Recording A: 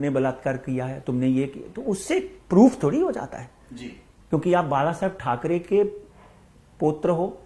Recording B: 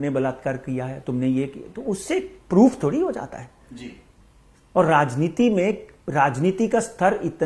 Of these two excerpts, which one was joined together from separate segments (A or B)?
A